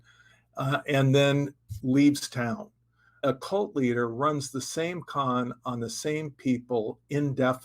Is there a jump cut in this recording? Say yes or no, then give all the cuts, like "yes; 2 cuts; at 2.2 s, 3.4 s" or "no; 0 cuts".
yes; 1 cut; at 3.2 s